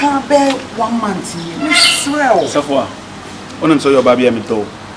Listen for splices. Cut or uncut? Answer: uncut